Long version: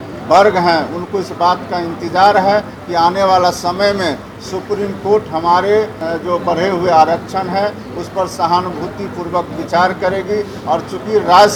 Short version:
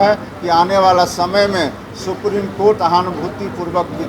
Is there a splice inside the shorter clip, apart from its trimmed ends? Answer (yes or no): yes